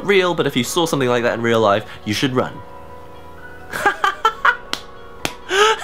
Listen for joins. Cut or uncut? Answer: uncut